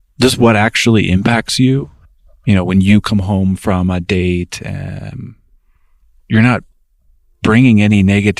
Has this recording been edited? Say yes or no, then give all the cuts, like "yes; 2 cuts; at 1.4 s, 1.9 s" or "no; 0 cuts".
yes; 1 cut; at 2.0 s